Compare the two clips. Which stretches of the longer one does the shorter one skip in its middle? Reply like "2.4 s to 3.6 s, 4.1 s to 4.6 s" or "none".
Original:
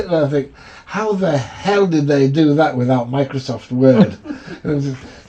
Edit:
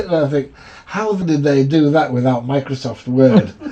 1.2 s to 1.9 s